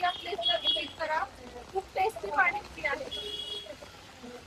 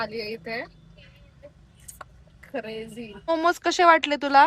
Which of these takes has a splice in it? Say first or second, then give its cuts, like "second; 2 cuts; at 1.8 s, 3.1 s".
second; 1 cut; at 3.2 s